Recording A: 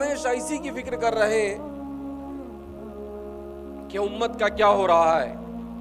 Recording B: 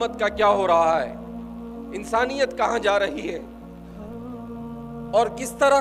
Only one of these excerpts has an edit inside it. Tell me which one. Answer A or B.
B